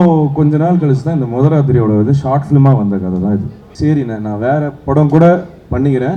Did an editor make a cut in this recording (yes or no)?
yes